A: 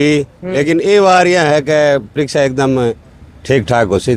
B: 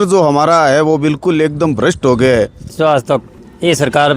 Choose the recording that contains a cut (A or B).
B